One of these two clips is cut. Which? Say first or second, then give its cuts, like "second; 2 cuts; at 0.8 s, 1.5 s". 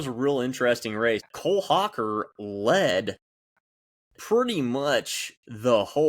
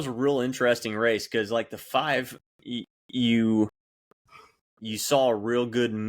first; 1 cut; at 1.2 s